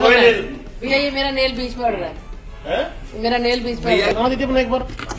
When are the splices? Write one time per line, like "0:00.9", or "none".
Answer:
0:04.1